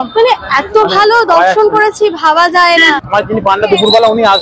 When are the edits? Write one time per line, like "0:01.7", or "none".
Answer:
0:03.0